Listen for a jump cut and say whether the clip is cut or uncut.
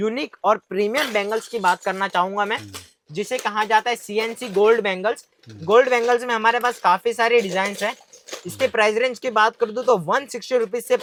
uncut